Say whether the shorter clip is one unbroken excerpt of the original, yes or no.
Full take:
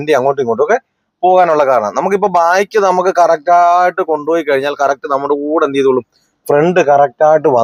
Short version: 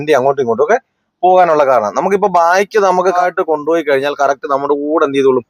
no